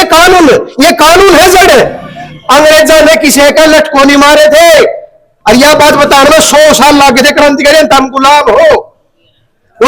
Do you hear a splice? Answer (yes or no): no